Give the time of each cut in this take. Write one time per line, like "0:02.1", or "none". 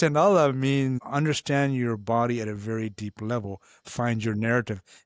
0:01.0